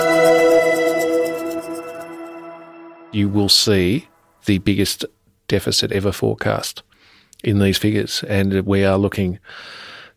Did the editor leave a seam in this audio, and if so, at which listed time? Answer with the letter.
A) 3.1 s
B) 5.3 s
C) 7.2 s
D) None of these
A